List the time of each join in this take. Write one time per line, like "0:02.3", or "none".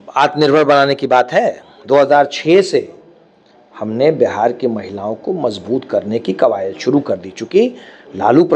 none